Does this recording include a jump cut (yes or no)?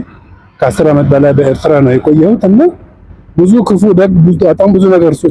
no